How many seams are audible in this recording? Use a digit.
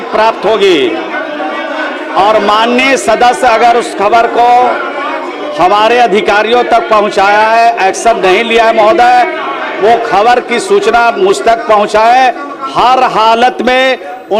0